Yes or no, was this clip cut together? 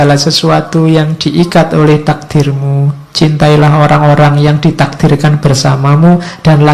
no